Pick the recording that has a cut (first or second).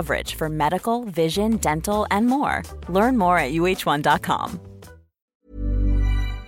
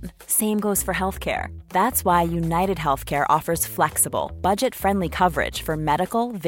first